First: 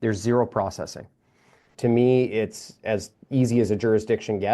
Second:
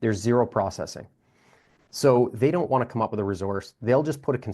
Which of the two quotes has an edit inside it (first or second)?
first